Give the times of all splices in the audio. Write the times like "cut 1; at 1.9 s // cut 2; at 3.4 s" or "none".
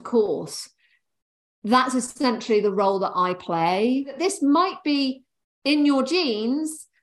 cut 1; at 4.2 s